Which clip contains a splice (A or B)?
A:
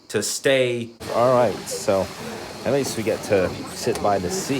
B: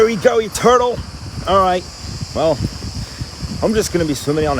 A